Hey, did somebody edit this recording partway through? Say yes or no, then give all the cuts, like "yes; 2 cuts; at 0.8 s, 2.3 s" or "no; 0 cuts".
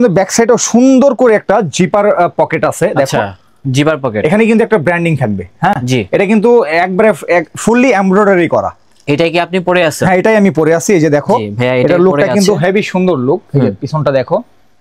no; 0 cuts